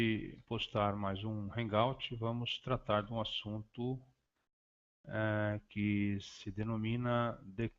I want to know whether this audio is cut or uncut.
uncut